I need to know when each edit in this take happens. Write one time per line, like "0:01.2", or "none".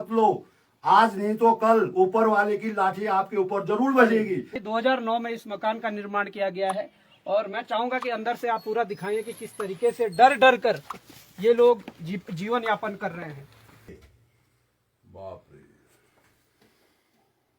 0:04.5
0:13.9